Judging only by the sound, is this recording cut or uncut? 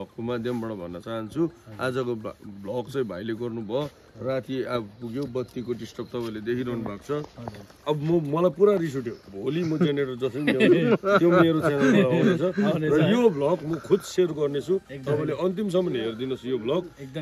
uncut